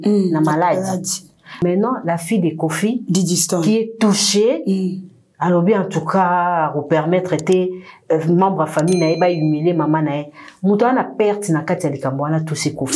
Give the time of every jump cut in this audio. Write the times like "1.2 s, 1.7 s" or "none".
1.5 s